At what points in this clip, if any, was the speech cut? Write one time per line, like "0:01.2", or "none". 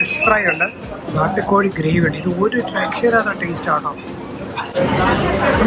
none